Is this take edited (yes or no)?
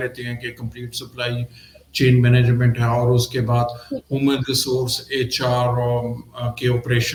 no